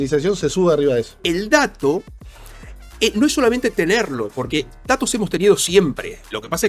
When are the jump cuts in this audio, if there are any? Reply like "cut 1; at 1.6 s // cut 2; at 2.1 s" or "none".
cut 1; at 1.1 s